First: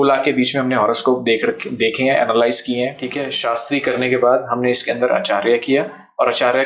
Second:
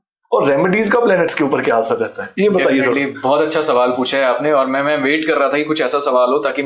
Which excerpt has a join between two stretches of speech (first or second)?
first